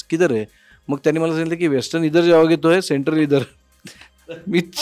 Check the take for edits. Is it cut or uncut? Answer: uncut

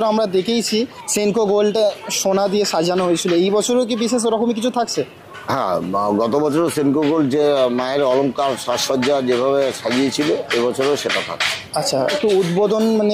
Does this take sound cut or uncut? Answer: cut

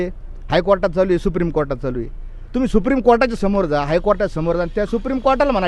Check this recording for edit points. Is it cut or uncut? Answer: uncut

